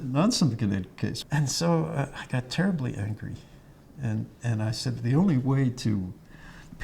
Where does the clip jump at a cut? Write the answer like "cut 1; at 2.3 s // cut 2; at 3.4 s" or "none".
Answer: none